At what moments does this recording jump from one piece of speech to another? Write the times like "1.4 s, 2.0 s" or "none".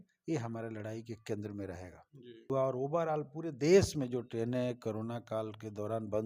2.5 s